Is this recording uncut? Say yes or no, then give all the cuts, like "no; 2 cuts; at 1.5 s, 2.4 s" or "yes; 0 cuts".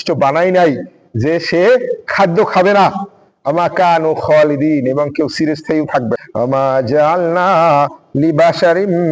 no; 1 cut; at 6.2 s